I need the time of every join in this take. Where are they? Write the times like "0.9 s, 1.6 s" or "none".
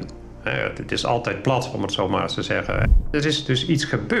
3.1 s